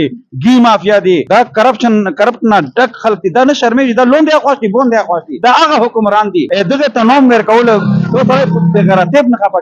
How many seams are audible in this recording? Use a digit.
3